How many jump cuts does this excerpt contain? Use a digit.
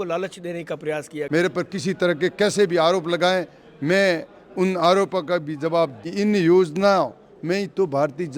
2